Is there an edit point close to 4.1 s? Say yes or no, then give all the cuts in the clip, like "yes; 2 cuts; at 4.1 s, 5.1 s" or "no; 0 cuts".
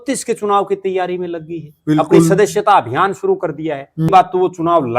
yes; 1 cut; at 4.1 s